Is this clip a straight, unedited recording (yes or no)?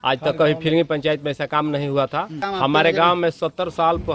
no